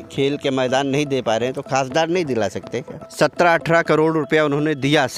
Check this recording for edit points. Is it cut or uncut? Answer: cut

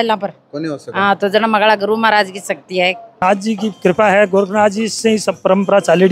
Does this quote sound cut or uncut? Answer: cut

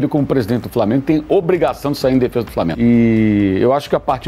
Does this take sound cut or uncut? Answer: cut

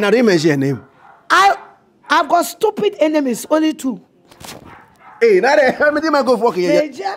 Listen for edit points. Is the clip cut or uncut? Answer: uncut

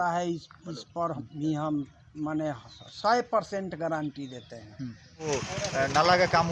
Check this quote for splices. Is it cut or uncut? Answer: cut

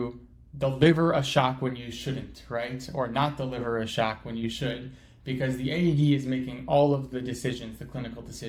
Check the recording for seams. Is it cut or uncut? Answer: uncut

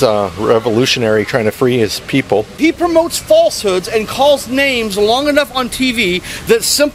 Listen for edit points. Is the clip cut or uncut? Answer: cut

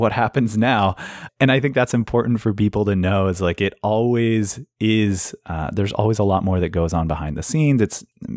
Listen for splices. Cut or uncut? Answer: cut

